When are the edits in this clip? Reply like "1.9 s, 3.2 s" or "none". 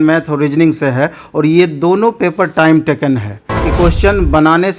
3.5 s